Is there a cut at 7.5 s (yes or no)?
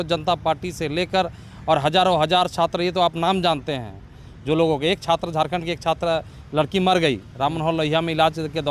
no